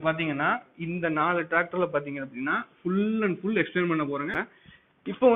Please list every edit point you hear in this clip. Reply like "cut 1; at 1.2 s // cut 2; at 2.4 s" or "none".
cut 1; at 4.4 s